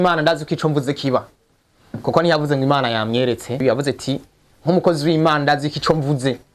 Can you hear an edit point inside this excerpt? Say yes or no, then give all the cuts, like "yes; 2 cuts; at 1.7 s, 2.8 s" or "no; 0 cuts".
yes; 1 cut; at 3.6 s